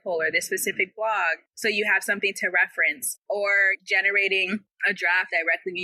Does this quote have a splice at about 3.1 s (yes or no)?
yes